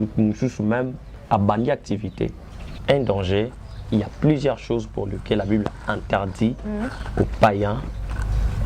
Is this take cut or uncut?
cut